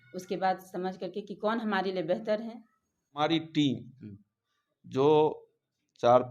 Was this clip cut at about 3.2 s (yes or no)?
yes